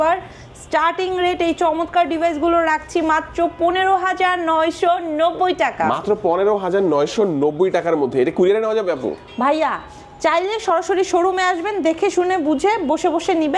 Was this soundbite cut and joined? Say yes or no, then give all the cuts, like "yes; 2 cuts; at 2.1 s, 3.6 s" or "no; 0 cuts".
no; 0 cuts